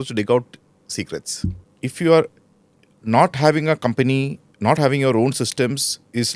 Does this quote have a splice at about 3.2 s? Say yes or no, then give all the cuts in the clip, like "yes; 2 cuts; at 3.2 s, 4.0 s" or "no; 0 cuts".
no; 1 cut; at 1.6 s